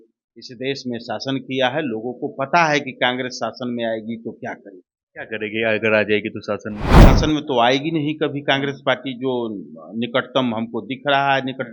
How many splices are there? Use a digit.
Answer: 1